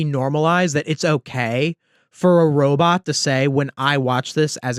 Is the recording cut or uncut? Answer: uncut